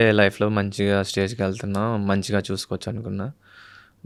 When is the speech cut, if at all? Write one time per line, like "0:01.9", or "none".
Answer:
none